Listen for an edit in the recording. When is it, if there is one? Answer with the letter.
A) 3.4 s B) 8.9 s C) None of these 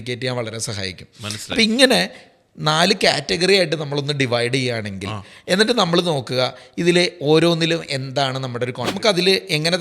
B